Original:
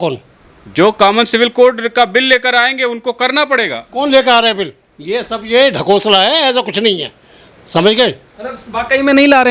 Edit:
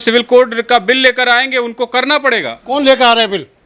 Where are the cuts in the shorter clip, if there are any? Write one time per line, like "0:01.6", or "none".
none